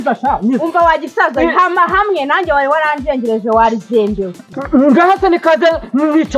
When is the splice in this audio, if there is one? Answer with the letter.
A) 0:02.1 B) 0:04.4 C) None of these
B